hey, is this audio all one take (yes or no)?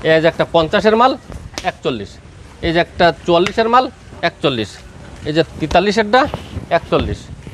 yes